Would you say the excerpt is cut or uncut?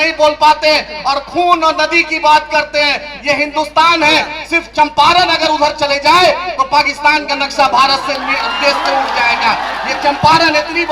uncut